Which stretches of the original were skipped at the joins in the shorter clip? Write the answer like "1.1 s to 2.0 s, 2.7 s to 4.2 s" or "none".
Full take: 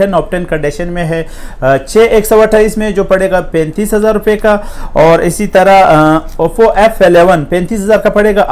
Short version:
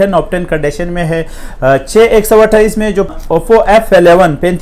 3.1 s to 6.2 s